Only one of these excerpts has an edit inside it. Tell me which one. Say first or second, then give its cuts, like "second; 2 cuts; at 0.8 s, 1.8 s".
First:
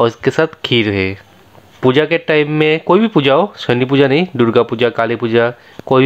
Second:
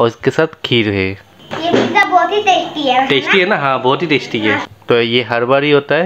second; 2 cuts; at 1.8 s, 4.6 s